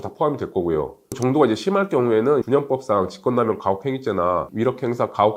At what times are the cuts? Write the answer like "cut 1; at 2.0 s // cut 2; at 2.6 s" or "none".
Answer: cut 1; at 1.1 s

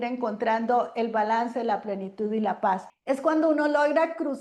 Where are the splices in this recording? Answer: cut 1; at 2.9 s

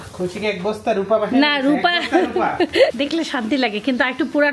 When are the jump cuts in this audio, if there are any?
cut 1; at 2.9 s

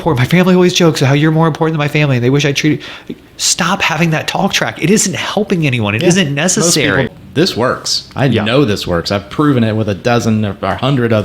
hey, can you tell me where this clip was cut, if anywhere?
cut 1; at 7.1 s

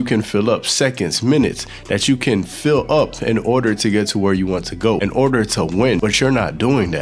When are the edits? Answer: cut 1; at 5.0 s // cut 2; at 6.0 s

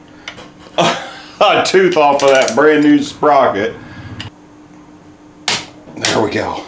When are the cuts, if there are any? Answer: cut 1; at 4.3 s

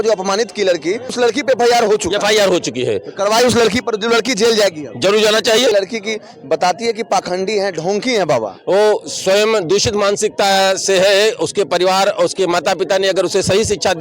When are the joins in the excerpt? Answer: cut 1; at 1.1 s // cut 2; at 5.7 s

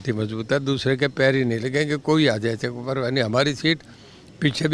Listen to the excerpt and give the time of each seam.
none

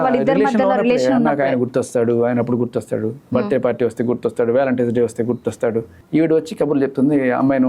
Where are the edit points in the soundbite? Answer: cut 1; at 6.0 s

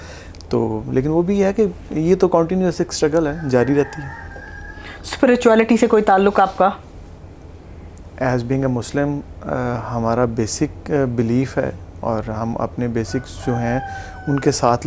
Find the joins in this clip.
none

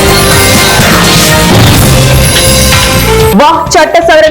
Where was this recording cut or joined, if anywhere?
cut 1; at 3.3 s

